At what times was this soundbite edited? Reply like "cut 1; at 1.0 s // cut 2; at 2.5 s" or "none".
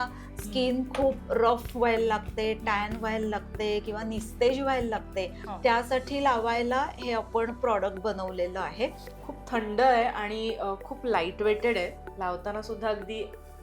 cut 1; at 9.1 s // cut 2; at 12.0 s